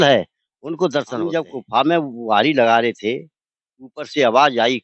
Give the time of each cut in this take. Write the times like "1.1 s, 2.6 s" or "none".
1.2 s